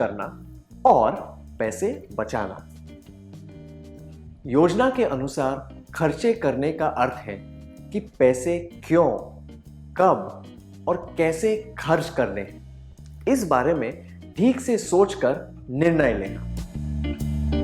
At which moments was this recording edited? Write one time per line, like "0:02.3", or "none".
0:16.5